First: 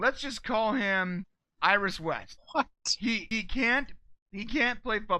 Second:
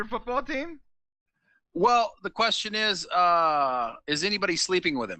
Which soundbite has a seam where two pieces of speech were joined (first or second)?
first